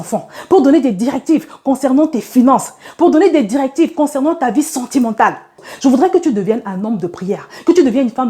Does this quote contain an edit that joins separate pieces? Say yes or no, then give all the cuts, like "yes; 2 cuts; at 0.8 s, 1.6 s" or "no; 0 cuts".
yes; 1 cut; at 5.6 s